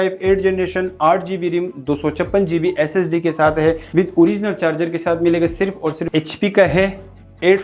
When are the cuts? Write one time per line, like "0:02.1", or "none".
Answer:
0:03.8
0:06.1